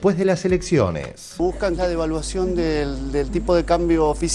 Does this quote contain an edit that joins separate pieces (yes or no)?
yes